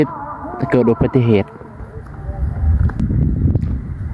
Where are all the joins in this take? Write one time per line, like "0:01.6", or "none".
0:03.0